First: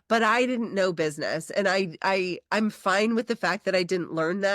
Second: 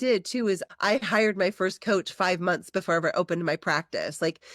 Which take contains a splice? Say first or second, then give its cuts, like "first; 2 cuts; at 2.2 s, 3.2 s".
second; 1 cut; at 0.9 s